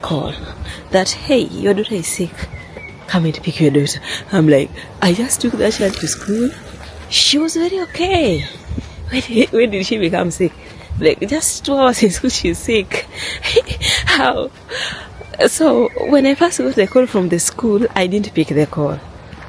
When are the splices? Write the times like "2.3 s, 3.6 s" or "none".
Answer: none